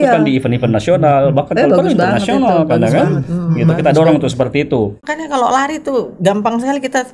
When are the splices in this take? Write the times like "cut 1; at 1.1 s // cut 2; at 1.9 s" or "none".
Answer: cut 1; at 5.0 s